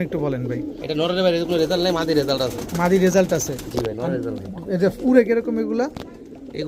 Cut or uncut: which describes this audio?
uncut